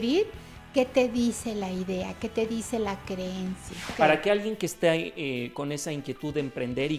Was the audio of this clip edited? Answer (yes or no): yes